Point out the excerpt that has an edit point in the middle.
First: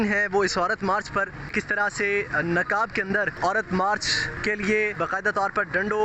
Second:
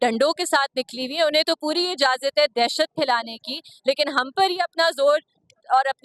first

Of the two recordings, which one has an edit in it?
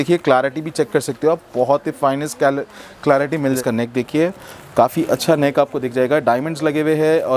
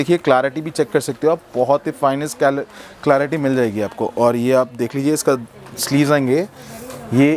first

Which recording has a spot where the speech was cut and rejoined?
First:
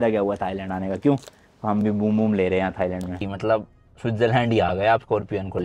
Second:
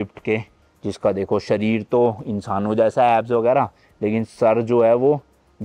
first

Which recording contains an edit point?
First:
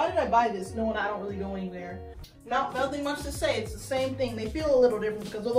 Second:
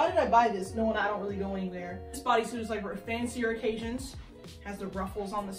first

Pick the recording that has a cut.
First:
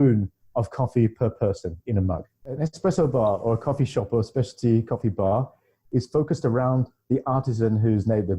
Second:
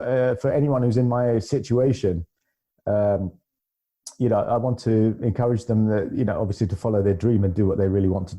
first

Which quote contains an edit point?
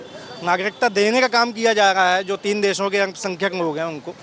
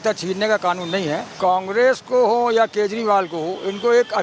second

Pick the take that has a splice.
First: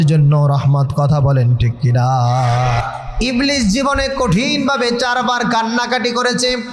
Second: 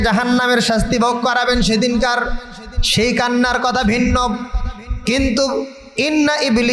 first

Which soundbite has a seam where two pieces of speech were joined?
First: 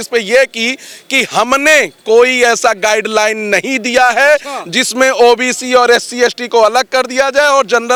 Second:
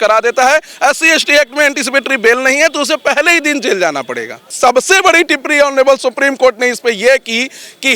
second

